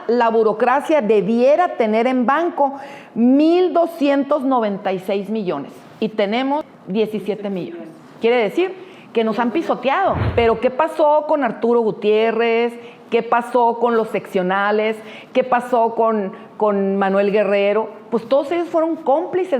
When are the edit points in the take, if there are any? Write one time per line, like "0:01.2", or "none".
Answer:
0:06.8
0:10.2